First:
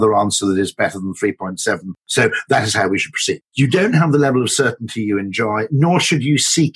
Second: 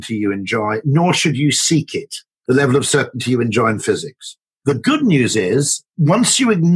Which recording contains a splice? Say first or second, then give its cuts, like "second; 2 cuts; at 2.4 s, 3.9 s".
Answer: first; 1 cut; at 3.5 s